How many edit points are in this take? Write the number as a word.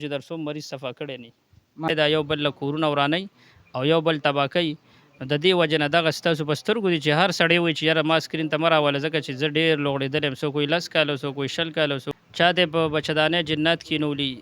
two